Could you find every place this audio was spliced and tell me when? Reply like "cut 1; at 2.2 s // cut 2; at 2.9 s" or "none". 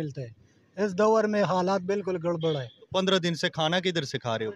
cut 1; at 2.7 s